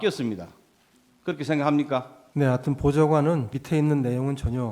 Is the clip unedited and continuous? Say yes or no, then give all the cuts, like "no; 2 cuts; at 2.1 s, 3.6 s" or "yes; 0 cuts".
no; 2 cuts; at 2.2 s, 3.6 s